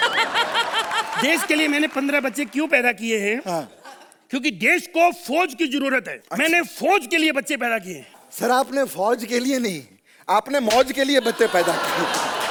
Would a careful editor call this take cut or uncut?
uncut